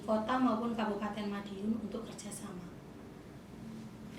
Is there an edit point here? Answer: no; 0 cuts

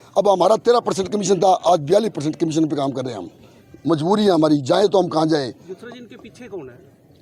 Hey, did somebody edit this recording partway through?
no; 0 cuts

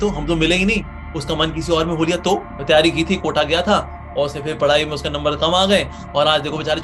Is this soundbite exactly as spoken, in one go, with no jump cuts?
no; 2 cuts; at 2.5 s, 6.0 s

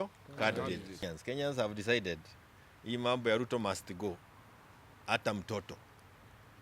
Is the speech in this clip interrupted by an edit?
yes; 1 cut; at 1.0 s

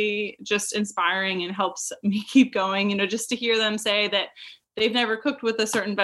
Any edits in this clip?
no; 0 cuts

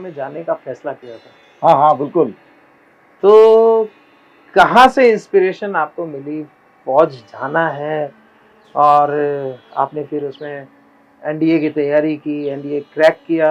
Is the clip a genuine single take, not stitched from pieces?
yes; 0 cuts

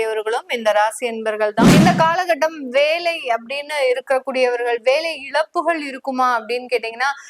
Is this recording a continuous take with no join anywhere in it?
no; 1 cut; at 1.7 s

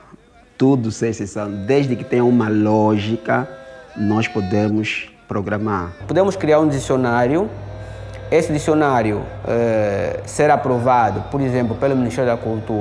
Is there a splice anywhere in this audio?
yes; 1 cut; at 6.0 s

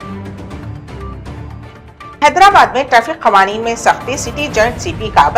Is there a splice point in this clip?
yes; 1 cut; at 1.3 s

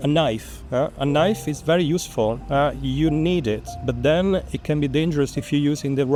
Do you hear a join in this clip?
no; 0 cuts

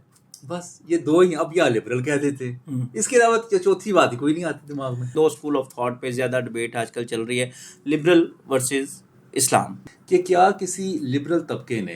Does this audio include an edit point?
yes; 2 cuts; at 5.1 s, 9.8 s

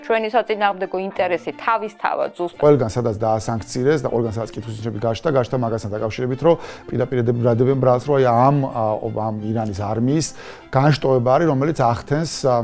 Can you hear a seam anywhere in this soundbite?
yes; 1 cut; at 2.5 s

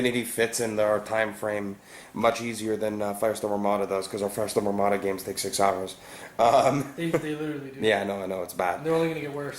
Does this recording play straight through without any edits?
no; 1 cut; at 2.5 s

